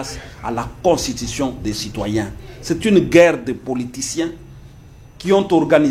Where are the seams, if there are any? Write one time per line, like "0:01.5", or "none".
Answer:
none